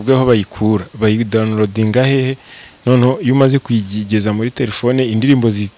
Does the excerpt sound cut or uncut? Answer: uncut